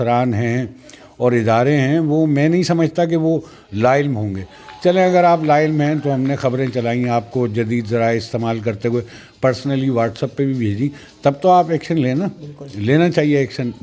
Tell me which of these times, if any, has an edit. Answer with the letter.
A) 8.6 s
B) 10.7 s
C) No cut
C